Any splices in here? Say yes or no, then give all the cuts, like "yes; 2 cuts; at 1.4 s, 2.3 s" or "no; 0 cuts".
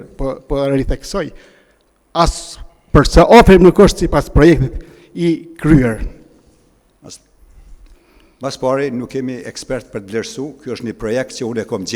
no; 0 cuts